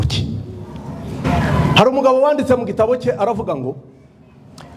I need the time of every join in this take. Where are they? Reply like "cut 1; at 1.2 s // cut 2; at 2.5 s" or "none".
cut 1; at 1.2 s

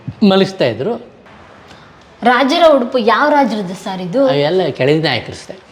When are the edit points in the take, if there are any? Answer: cut 1; at 1.1 s

